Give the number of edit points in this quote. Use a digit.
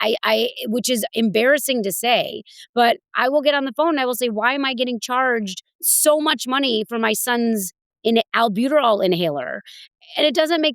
2